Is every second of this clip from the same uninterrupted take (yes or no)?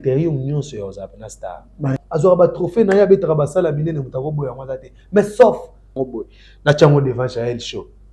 no